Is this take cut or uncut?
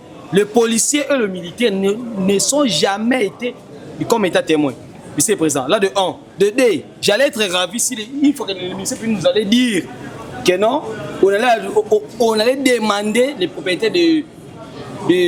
uncut